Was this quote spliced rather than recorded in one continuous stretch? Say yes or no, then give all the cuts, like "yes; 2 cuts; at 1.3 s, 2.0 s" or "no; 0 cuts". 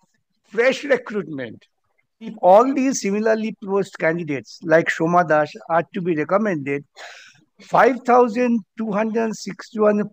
yes; 1 cut; at 2.3 s